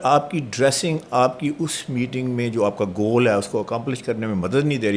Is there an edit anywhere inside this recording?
no; 0 cuts

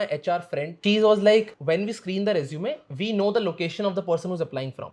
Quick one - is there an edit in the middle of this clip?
no; 0 cuts

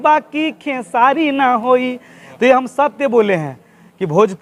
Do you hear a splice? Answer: no; 0 cuts

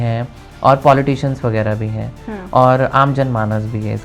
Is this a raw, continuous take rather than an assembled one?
yes; 0 cuts

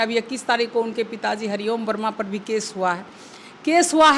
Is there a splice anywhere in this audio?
no; 0 cuts

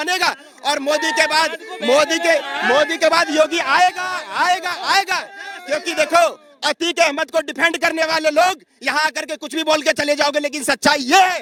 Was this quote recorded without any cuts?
yes; 0 cuts

